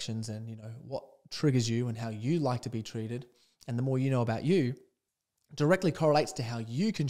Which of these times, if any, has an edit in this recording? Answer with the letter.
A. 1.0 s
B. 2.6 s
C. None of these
C